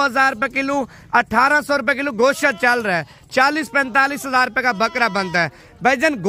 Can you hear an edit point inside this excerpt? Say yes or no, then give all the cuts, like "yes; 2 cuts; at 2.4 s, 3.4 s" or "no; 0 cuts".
no; 0 cuts